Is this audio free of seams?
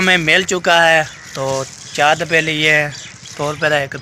yes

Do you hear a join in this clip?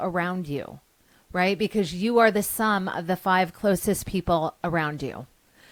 no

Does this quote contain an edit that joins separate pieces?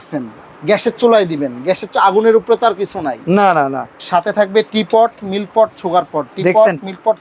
yes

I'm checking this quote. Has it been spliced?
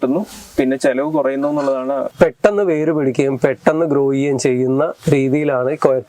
yes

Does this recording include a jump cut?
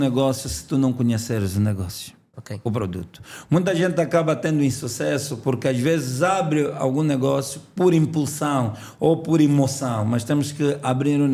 no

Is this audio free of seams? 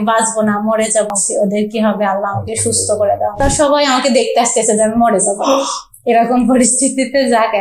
no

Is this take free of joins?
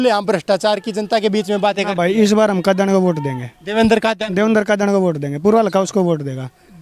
yes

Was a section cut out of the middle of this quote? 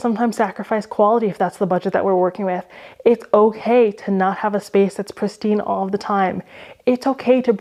no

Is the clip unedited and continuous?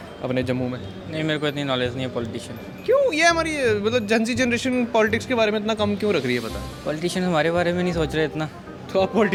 yes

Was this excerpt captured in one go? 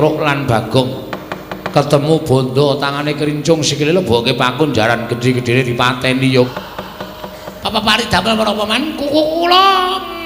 no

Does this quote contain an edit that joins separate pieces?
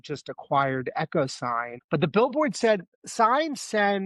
yes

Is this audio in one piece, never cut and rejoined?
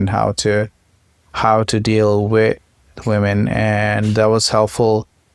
yes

